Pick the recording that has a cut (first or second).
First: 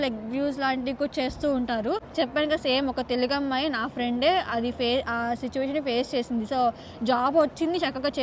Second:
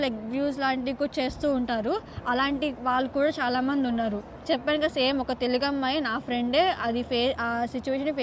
first